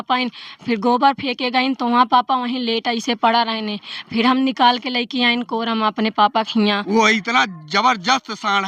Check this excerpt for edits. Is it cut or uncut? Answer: cut